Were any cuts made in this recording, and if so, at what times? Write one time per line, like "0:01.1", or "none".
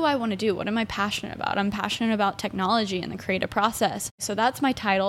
0:04.2